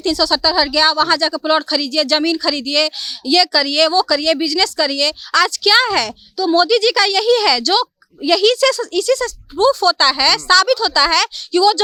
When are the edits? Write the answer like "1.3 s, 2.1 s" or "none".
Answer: none